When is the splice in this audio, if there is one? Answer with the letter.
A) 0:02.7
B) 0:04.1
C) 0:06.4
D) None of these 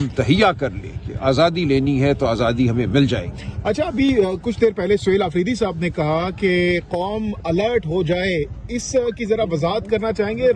D